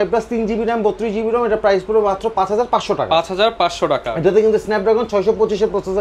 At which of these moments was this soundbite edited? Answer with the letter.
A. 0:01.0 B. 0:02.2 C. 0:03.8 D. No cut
D